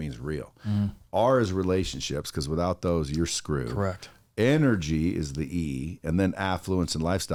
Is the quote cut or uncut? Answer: uncut